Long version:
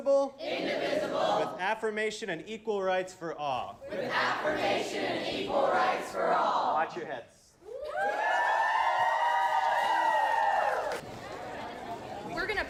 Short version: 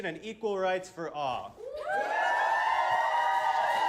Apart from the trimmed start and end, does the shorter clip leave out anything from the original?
yes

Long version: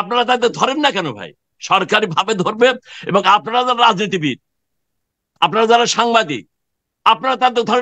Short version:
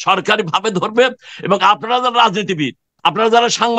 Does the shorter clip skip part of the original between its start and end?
yes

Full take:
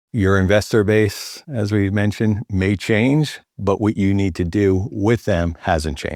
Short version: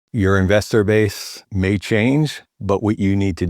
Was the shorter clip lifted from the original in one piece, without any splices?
no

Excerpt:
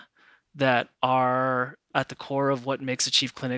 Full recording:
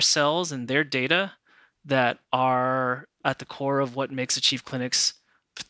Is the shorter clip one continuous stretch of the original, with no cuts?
yes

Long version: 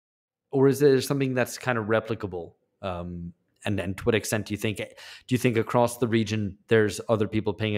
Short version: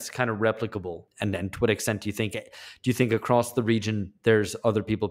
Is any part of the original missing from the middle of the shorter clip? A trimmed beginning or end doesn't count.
yes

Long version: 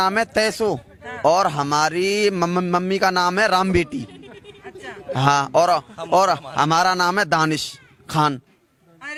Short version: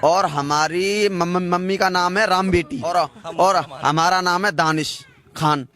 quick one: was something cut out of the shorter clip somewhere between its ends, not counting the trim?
yes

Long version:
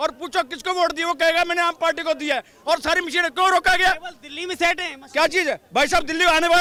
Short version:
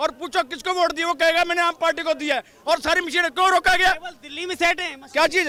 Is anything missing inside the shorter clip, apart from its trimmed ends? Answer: no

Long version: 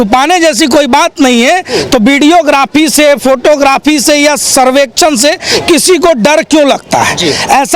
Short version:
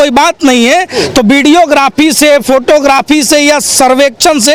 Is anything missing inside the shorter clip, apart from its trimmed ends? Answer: no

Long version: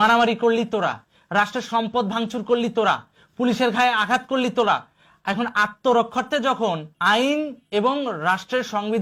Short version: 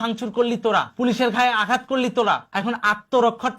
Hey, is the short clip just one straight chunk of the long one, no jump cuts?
no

